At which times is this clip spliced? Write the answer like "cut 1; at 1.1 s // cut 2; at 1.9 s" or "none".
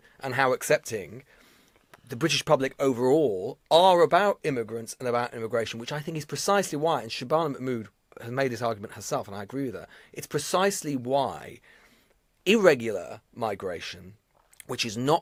none